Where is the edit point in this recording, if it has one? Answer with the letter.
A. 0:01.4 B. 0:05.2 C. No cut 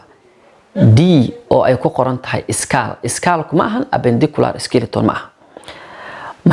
C